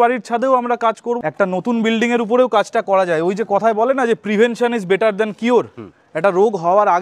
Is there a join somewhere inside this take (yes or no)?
yes